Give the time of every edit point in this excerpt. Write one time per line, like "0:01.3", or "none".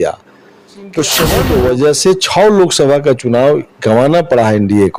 0:01.4